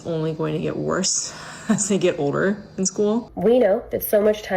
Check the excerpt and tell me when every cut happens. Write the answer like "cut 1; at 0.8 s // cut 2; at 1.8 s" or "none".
cut 1; at 3.3 s